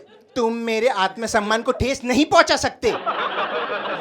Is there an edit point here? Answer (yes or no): yes